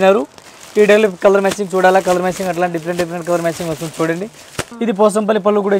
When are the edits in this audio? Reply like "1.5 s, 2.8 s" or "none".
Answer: 4.6 s